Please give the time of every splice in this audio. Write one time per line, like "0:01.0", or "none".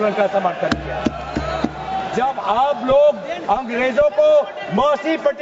0:02.0